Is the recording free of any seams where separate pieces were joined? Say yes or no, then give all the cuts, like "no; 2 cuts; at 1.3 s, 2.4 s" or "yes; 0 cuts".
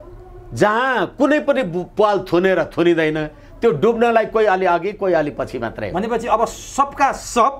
yes; 0 cuts